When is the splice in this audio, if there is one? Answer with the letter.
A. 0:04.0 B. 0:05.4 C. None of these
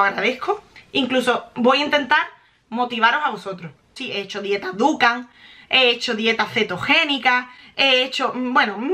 A